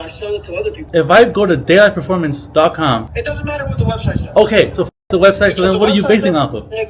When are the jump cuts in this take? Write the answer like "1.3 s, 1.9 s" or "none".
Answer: 0.8 s, 3.1 s